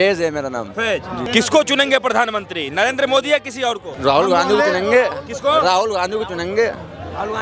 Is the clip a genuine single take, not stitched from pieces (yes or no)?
no